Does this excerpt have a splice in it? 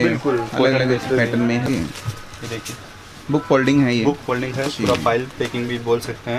yes; 1 cut; at 1.6 s

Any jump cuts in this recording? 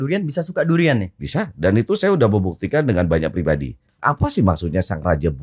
yes; 1 cut; at 3.8 s

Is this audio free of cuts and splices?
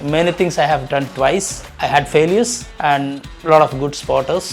no; 2 cuts; at 1.7 s, 2.7 s

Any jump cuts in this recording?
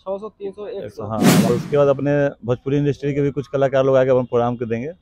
yes; 1 cut; at 1.5 s

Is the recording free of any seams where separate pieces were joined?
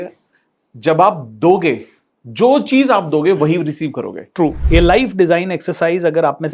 no; 1 cut; at 4.6 s

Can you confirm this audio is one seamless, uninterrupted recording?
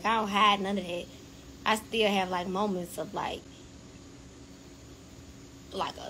yes; 0 cuts

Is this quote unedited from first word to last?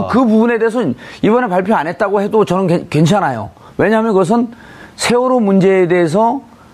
no; 1 cut; at 3.0 s

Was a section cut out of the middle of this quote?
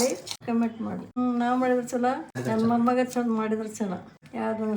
yes; 1 cut; at 1.0 s

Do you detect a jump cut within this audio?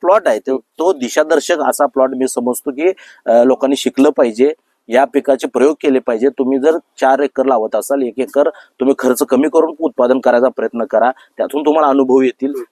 no; 0 cuts

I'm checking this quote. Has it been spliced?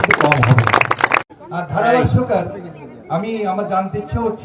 yes; 1 cut; at 1.2 s

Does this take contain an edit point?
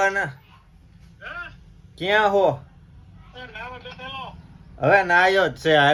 no; 0 cuts

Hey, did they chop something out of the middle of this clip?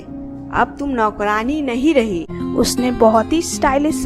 yes; 1 cut; at 2.4 s

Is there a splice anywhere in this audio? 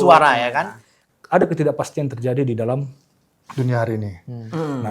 yes; 1 cut; at 1.0 s

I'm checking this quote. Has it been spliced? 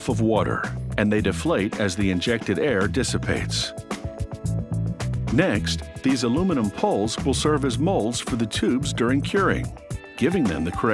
no; 0 cuts

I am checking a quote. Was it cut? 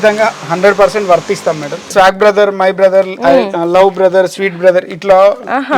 yes; 1 cut; at 1.9 s

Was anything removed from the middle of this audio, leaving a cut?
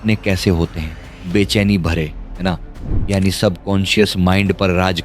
yes; 1 cut; at 2.9 s

